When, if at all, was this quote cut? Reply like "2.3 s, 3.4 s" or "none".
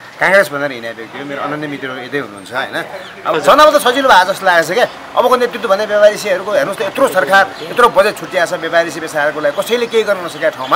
3.3 s